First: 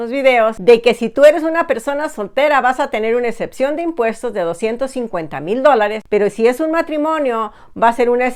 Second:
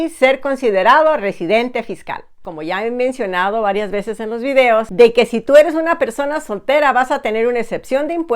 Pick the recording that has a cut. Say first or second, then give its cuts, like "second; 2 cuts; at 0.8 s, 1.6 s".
second; 1 cut; at 2.5 s